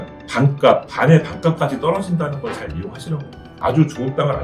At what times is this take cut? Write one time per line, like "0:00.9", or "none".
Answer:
0:03.5